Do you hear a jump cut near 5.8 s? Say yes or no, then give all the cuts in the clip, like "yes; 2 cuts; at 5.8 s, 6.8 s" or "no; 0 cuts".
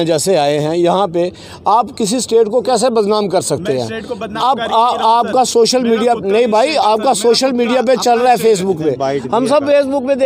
no; 0 cuts